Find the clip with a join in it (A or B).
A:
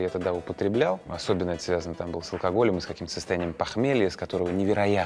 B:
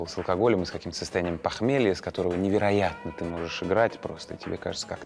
A